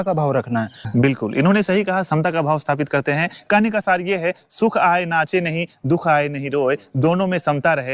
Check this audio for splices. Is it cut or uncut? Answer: uncut